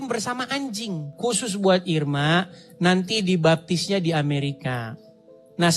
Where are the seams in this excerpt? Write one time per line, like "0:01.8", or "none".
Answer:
0:01.1